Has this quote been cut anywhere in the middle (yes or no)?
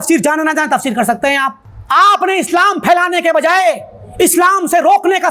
yes